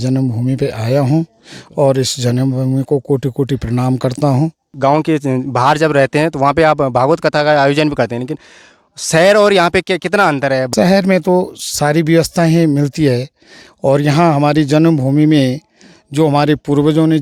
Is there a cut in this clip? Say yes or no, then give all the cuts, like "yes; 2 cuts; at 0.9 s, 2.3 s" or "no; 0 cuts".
no; 0 cuts